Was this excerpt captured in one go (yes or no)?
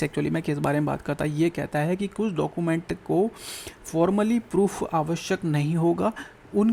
yes